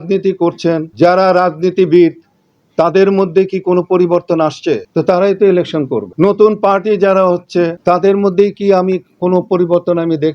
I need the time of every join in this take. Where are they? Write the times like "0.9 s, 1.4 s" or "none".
0.9 s, 4.9 s, 6.1 s, 7.8 s